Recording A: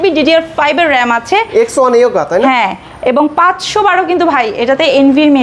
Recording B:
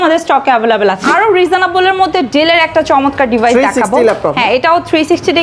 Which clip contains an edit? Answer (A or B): B